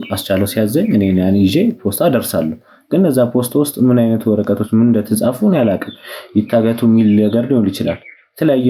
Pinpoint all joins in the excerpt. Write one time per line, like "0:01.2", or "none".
none